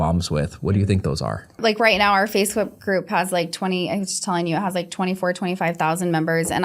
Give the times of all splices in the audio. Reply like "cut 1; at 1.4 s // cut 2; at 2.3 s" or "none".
cut 1; at 1.6 s

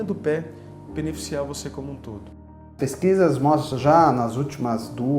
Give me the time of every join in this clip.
cut 1; at 2.7 s

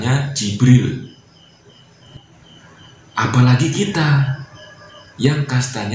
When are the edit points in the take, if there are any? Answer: cut 1; at 2.1 s

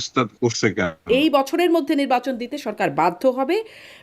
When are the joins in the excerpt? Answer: cut 1; at 1.1 s

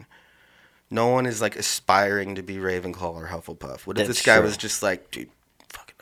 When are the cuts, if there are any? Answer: none

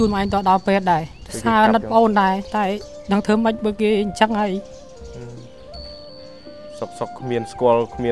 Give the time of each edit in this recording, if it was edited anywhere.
cut 1; at 1.2 s

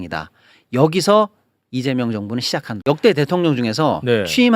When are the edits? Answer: cut 1; at 2.6 s

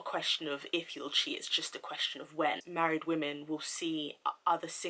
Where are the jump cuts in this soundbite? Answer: cut 1; at 2.6 s

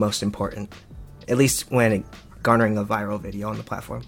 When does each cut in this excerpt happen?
none

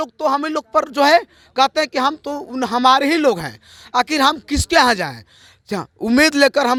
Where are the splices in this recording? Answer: none

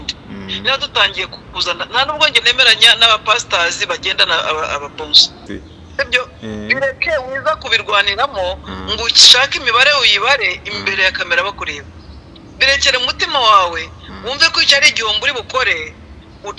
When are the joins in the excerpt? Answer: cut 1; at 5.5 s

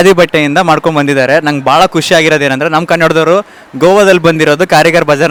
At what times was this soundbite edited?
none

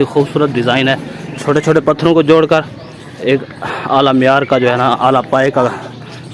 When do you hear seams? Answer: none

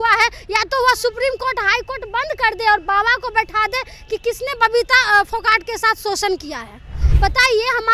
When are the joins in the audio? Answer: cut 1; at 7.0 s

